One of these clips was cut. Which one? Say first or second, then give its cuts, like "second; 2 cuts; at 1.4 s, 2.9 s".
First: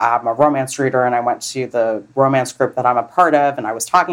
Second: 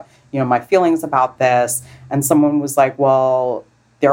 first; 1 cut; at 2.0 s